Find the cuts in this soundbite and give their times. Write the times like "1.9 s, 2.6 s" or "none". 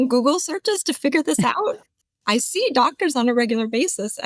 2.0 s